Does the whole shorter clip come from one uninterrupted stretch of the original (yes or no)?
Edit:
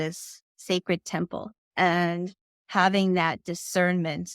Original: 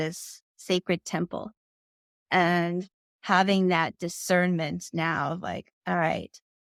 no